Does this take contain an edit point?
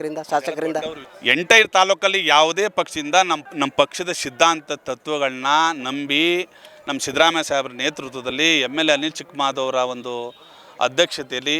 yes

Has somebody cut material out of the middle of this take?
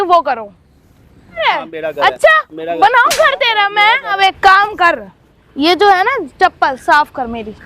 yes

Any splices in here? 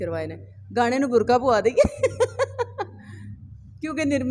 no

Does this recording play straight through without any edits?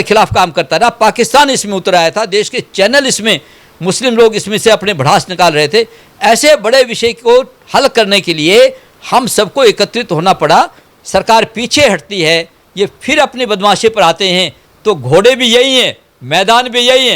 no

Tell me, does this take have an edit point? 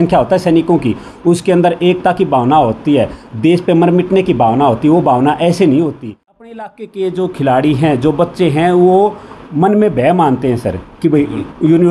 yes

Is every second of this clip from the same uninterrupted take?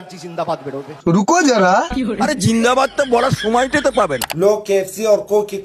no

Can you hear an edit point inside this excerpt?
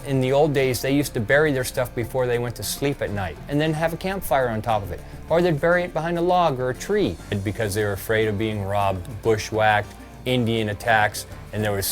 yes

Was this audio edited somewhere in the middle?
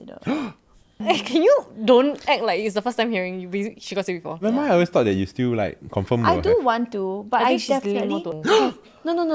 yes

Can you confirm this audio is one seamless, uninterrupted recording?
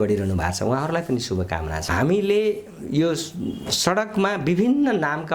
no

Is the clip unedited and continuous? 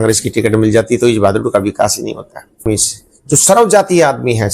no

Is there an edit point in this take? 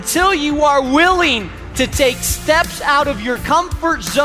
yes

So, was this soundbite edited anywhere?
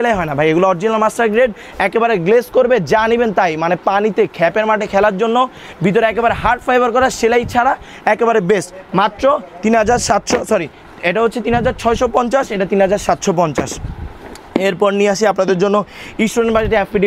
no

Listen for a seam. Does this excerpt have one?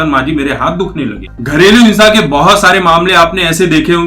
yes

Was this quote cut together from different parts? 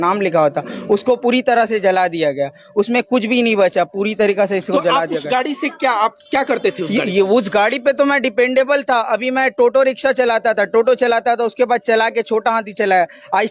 no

